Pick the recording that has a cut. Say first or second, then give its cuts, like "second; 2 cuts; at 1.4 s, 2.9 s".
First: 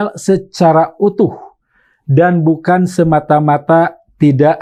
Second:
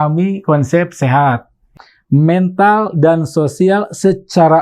second; 1 cut; at 1.6 s